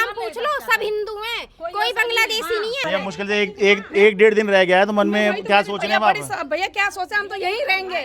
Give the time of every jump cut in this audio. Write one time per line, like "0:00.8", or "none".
0:02.8